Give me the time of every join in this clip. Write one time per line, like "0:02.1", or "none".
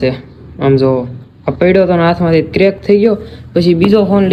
none